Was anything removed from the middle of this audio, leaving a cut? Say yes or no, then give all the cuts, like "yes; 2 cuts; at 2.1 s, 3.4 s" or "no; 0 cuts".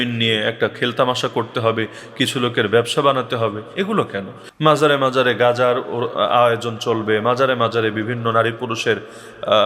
yes; 1 cut; at 4.4 s